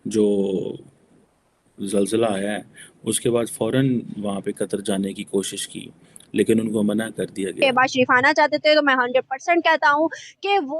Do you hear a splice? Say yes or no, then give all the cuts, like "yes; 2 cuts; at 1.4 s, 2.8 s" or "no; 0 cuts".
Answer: yes; 1 cut; at 7.6 s